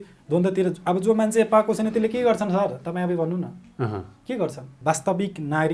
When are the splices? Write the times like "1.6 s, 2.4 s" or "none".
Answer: 4.8 s